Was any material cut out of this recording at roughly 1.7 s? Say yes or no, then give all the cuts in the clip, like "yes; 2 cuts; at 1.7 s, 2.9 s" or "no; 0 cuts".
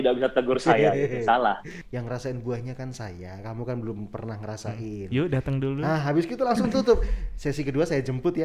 yes; 1 cut; at 1.7 s